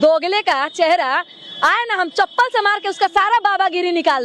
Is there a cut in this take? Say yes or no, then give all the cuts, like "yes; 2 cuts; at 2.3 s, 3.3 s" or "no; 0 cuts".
no; 0 cuts